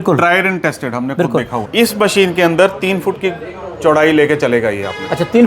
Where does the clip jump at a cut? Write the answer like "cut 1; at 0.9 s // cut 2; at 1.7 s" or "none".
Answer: cut 1; at 1.6 s